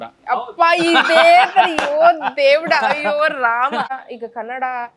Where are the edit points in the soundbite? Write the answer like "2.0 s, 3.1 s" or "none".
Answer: 3.9 s